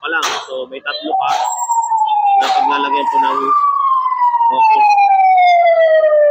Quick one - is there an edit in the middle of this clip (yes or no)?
no